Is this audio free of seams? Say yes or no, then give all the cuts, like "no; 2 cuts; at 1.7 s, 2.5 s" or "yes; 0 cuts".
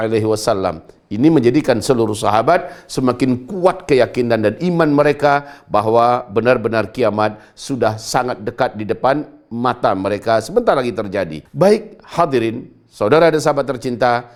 yes; 0 cuts